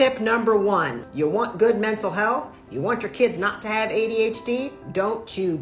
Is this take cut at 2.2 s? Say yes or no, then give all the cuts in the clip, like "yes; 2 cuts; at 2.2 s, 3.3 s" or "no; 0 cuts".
no; 1 cut; at 1.0 s